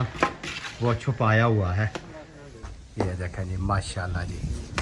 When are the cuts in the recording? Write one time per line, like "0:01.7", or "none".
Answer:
0:02.4